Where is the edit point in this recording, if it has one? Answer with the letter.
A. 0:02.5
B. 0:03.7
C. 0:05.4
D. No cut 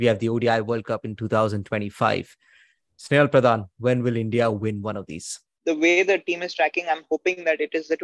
C